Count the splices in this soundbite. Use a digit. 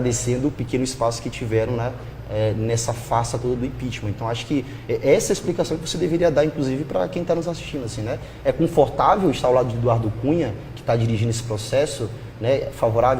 1